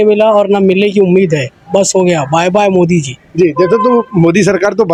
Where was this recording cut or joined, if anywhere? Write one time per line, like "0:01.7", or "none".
none